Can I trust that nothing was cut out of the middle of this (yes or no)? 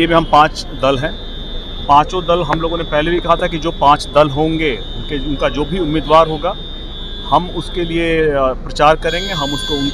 yes